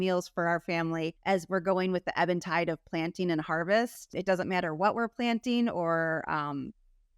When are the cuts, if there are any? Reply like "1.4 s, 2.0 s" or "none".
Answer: 1.2 s, 4.1 s

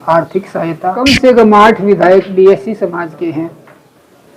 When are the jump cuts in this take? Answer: 1.0 s

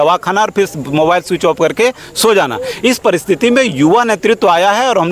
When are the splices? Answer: none

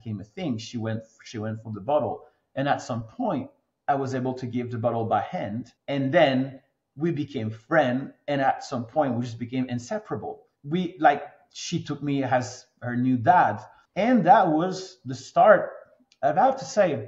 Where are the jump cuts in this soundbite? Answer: none

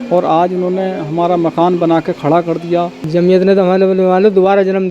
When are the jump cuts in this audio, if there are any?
3.0 s

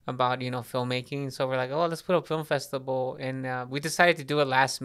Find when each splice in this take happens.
none

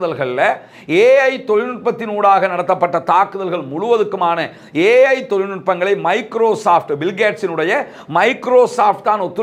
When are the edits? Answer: none

